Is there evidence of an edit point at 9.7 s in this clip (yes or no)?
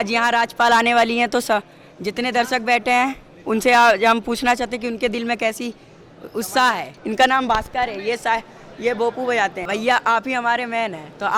yes